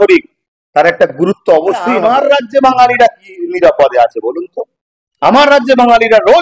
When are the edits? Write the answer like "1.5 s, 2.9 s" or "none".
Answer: 1.9 s